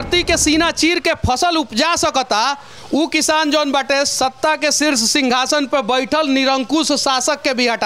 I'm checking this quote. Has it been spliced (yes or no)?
no